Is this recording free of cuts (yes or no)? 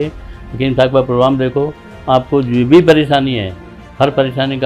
yes